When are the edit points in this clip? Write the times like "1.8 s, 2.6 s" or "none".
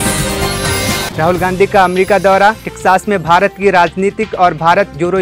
1.1 s